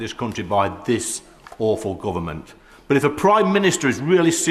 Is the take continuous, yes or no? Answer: yes